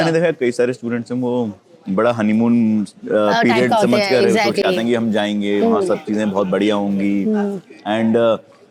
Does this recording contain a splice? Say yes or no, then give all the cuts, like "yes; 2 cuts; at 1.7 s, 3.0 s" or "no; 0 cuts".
no; 0 cuts